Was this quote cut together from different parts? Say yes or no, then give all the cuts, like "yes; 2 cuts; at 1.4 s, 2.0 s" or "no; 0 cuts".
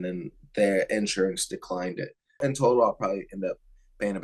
yes; 1 cut; at 2.4 s